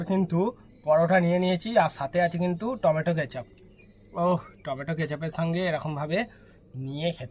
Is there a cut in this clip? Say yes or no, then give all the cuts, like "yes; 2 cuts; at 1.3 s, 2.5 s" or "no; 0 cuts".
no; 0 cuts